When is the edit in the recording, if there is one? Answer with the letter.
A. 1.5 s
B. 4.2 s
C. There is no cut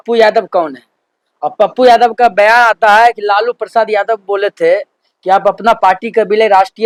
C